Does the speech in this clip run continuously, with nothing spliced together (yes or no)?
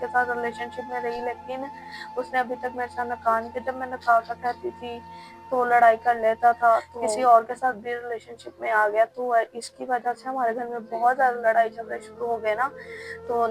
no